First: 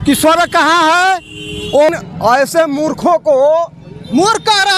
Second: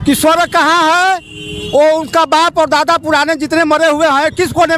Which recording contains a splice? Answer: first; 1 cut; at 1.9 s

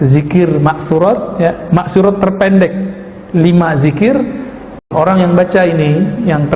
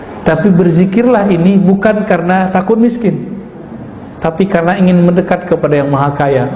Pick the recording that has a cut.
first; 1 cut; at 4.9 s

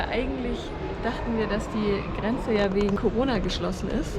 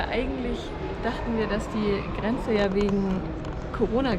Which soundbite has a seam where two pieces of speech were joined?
first; 1 cut; at 3.0 s

